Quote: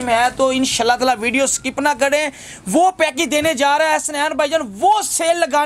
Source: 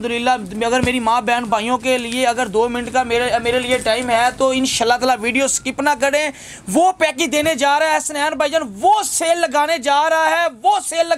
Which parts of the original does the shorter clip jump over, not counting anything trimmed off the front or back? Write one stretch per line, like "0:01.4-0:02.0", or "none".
none

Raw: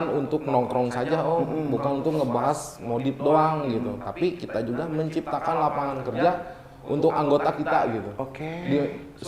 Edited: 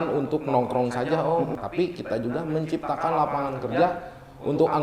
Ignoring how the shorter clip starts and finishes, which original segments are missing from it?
0:01.5-0:04.0

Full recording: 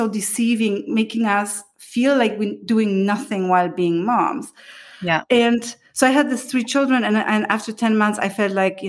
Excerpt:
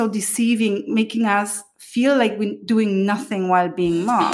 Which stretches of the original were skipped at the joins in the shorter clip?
none

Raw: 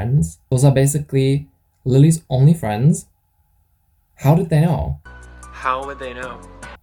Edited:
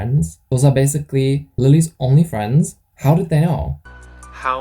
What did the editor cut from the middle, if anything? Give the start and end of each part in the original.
0:01.5-0:01.8
0:03.1-0:04.0

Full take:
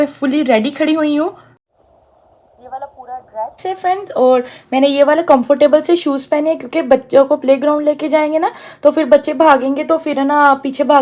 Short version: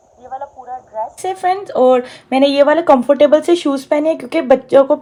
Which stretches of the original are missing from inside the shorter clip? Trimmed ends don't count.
none

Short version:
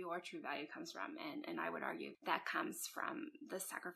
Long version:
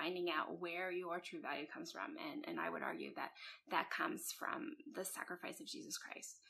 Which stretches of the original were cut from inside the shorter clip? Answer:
0:03.1-0:03.6

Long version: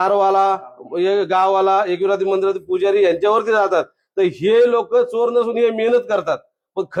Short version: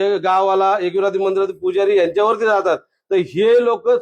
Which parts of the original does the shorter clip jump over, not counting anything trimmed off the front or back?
none

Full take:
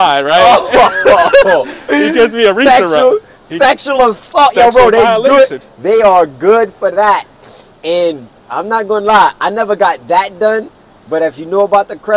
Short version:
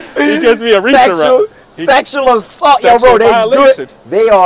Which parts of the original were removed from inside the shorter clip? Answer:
none

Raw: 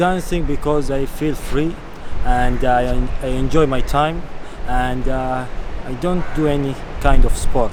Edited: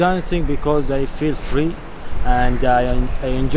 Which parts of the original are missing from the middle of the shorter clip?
none

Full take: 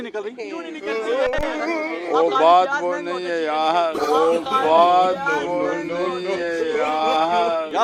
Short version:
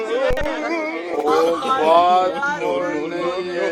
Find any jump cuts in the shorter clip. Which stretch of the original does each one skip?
0:02.1-0:04.0

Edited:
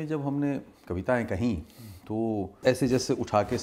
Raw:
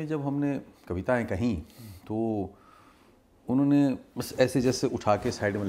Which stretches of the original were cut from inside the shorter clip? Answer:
0:02.5-0:04.3

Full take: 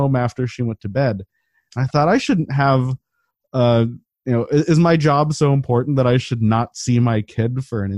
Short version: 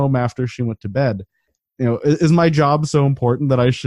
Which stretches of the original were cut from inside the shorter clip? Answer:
0:01.6-0:04.1

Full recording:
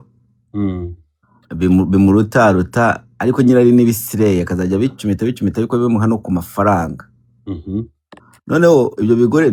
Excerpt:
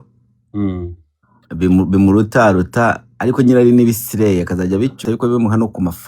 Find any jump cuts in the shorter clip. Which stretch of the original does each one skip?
0:05.0-0:05.5

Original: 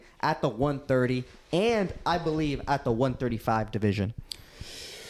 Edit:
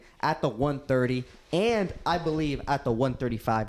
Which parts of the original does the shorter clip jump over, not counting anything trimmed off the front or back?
none

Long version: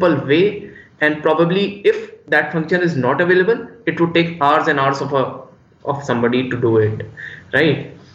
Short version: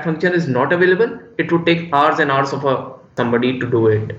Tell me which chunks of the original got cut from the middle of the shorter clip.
0:05.6-0:06.0

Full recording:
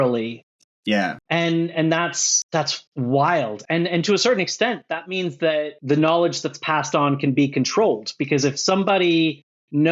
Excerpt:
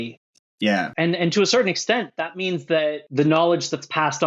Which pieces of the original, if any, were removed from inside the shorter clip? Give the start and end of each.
0:01.2-0:03.6

